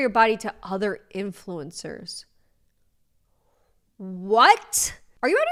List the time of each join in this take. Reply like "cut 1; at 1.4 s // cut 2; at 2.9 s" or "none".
none